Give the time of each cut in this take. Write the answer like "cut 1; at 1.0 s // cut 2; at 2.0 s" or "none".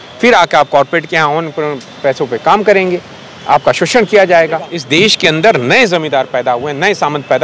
cut 1; at 4.8 s